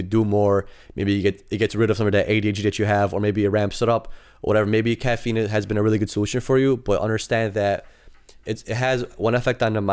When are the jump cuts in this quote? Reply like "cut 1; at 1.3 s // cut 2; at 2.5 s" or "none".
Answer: none